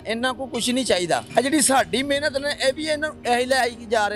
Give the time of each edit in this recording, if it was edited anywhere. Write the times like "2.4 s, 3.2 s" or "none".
none